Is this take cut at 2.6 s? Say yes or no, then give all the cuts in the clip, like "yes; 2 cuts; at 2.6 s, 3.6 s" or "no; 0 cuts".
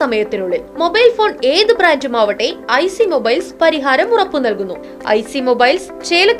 no; 1 cut; at 4.8 s